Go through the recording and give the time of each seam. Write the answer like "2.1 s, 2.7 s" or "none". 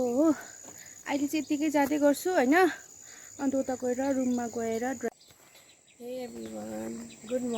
5.1 s